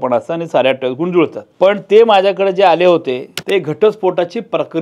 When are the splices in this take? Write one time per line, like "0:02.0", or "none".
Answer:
0:01.4
0:03.3